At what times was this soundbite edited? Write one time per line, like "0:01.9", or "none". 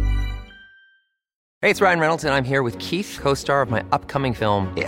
0:01.4